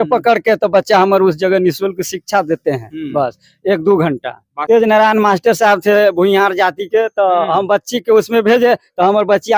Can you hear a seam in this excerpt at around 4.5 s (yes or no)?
yes